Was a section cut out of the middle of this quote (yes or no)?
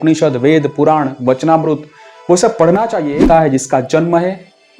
yes